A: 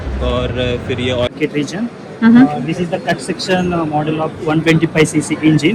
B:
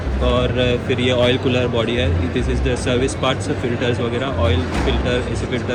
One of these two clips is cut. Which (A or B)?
A